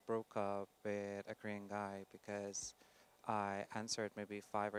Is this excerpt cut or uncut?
uncut